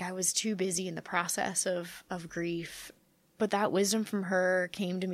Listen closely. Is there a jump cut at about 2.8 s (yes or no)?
yes